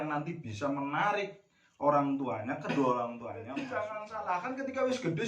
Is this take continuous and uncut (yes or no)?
no